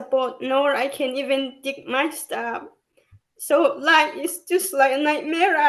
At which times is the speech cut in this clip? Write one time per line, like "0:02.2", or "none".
none